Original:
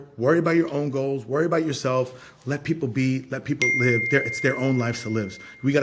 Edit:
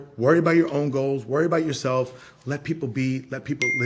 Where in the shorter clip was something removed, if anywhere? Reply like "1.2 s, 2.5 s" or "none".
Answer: none